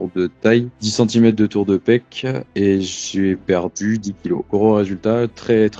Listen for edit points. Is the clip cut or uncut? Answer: cut